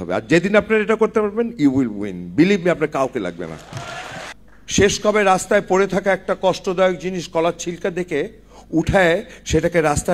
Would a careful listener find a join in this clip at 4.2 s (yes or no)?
yes